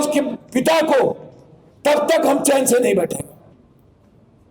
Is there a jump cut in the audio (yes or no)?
yes